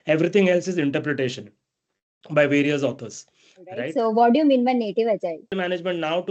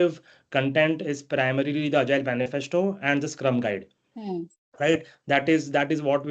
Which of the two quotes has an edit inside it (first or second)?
first